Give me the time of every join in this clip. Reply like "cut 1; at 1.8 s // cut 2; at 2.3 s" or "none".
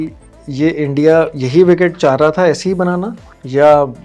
none